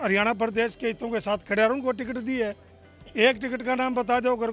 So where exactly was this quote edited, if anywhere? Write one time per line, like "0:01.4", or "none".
none